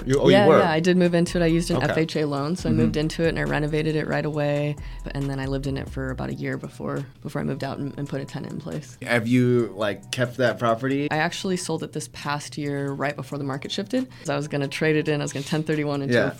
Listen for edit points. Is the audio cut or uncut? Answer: cut